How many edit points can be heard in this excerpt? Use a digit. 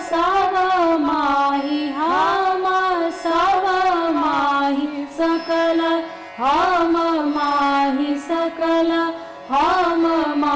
0